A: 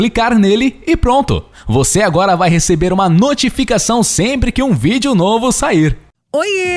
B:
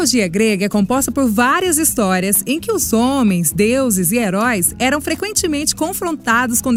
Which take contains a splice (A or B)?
A